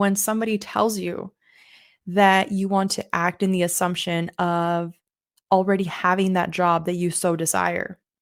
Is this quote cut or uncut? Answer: uncut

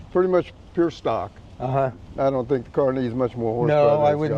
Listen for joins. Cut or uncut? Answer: cut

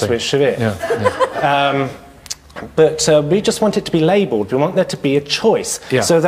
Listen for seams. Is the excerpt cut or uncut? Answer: uncut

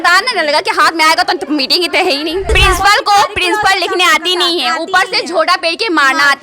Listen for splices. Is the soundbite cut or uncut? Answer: cut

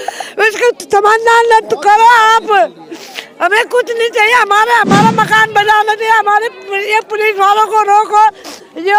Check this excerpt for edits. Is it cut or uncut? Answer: uncut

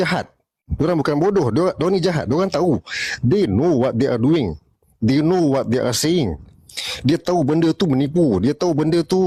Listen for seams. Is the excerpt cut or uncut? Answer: uncut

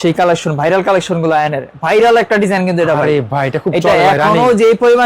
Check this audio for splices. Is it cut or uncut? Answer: uncut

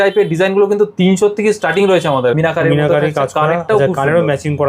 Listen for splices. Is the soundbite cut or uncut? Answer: cut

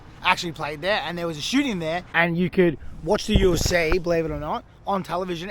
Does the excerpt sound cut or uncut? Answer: cut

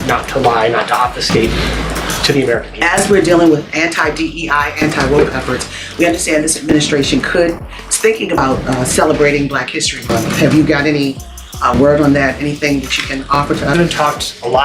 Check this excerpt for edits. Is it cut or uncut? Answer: cut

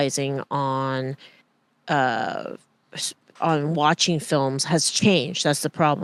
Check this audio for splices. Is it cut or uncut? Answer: uncut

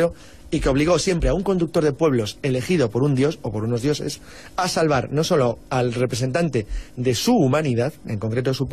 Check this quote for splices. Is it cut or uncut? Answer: uncut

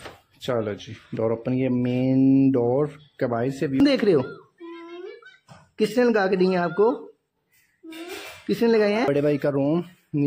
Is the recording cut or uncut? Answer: cut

